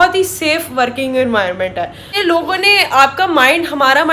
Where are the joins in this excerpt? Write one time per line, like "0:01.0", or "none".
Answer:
0:02.1